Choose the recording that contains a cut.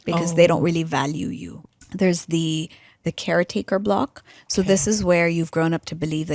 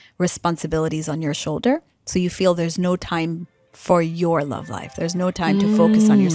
first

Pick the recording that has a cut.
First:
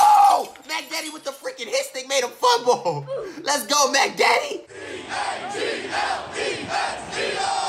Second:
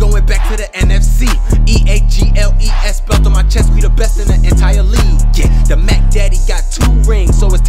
first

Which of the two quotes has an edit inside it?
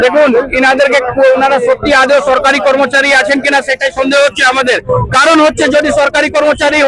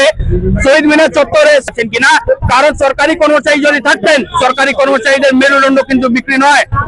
second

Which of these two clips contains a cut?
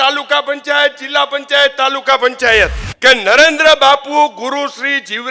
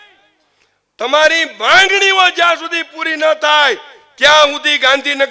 first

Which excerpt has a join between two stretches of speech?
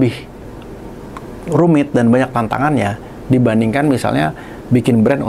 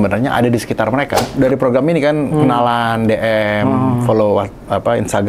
second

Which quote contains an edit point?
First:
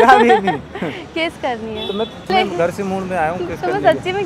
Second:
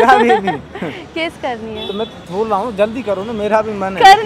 first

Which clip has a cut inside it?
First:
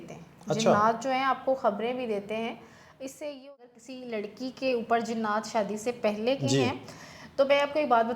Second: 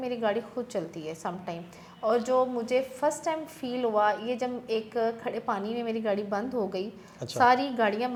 first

